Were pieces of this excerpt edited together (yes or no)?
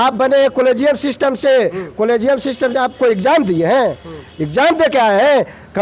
no